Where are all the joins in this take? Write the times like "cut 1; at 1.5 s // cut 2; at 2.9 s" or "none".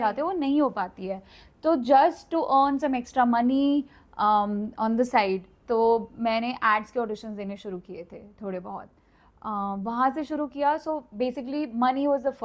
none